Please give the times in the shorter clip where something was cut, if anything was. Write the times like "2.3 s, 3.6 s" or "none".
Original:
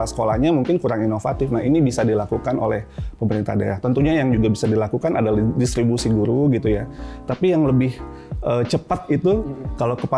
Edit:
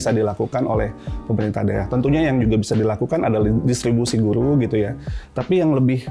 none